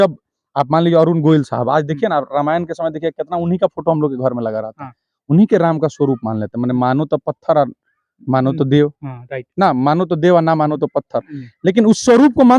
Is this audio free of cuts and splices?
yes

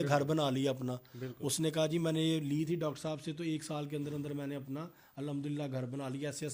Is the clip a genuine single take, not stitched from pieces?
yes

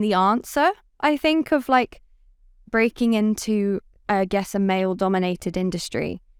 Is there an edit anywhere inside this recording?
no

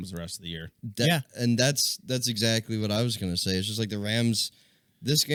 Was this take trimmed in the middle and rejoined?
no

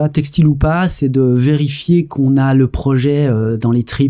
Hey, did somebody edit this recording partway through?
no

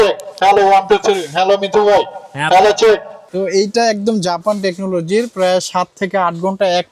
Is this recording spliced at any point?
yes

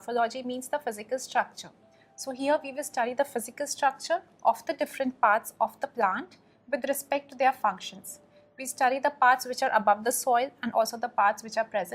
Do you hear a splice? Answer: yes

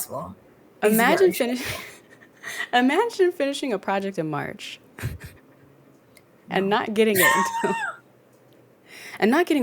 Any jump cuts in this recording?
no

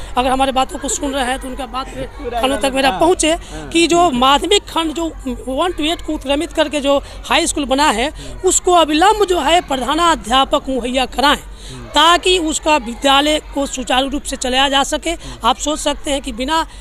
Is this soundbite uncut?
yes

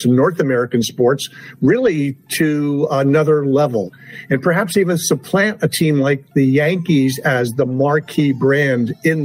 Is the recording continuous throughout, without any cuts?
no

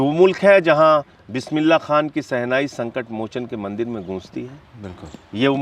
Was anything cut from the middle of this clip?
no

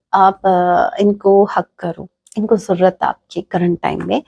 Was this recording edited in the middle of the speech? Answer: no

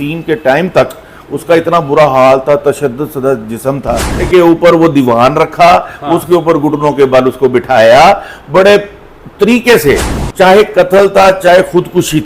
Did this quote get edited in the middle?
yes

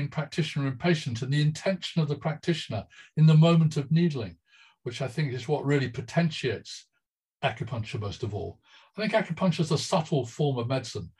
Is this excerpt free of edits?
yes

